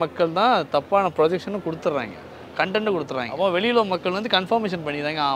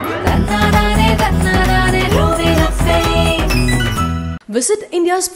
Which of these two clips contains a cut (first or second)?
first